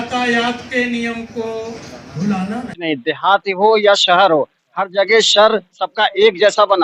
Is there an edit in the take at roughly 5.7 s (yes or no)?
no